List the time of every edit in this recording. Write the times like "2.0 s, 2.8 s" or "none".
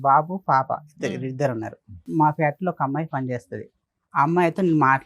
2.1 s